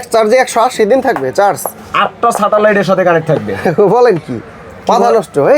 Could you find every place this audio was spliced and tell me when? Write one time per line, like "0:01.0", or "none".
none